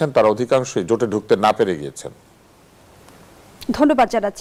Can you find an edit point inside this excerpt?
no; 0 cuts

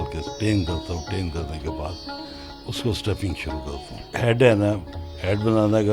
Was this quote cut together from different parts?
yes; 1 cut; at 4.1 s

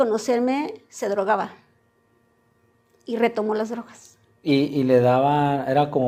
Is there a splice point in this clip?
no; 0 cuts

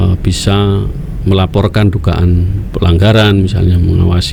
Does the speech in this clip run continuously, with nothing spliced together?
yes; 0 cuts

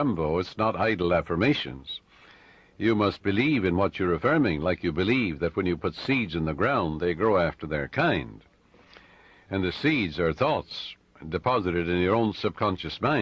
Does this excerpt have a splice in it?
yes; 1 cut; at 10.4 s

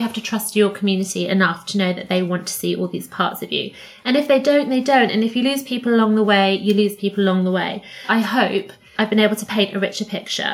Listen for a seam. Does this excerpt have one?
yes; 1 cut; at 8.0 s

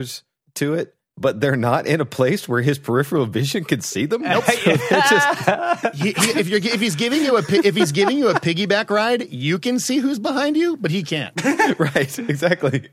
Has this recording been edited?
no; 0 cuts

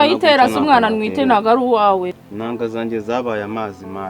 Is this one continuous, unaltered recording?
no; 1 cut; at 2.1 s

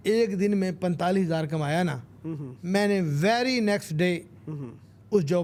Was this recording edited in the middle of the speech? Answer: no; 0 cuts

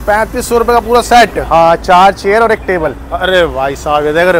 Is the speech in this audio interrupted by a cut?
no; 0 cuts

